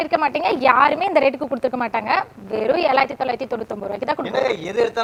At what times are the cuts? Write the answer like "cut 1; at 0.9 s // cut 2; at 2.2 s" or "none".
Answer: none